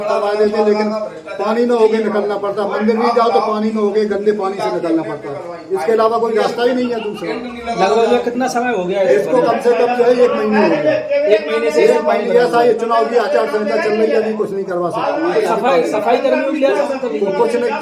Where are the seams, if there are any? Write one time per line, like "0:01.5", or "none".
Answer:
none